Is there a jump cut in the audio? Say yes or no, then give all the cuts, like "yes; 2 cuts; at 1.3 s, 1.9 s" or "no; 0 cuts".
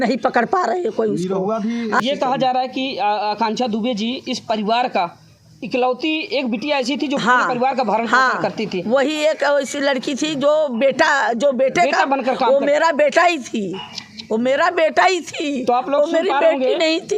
yes; 1 cut; at 2.0 s